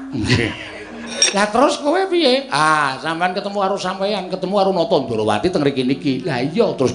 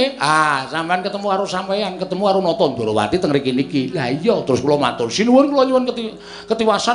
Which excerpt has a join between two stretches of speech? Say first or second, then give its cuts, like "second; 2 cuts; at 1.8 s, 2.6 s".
first; 1 cut; at 1.1 s